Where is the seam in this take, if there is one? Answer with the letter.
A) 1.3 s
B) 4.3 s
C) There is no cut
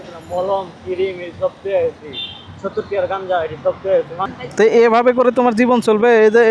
B